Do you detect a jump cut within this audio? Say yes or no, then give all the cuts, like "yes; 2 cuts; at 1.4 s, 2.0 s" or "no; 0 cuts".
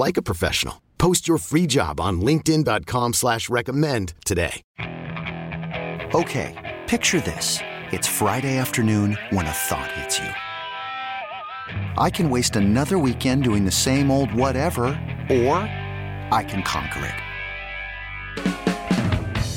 yes; 1 cut; at 4.6 s